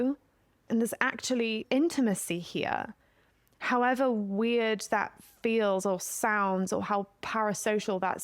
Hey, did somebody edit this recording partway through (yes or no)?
yes